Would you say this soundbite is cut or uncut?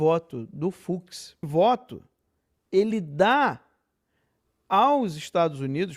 cut